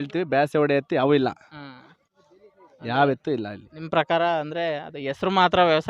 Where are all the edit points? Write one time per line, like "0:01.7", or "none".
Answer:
none